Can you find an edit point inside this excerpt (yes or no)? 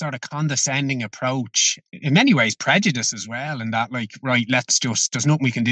yes